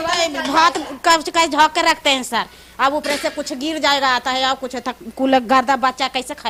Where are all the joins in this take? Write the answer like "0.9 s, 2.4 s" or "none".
none